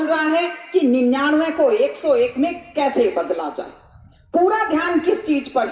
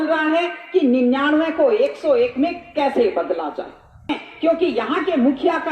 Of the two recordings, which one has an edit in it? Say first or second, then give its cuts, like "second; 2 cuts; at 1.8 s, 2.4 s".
second; 1 cut; at 4.2 s